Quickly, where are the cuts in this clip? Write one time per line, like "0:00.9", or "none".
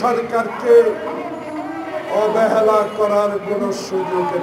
none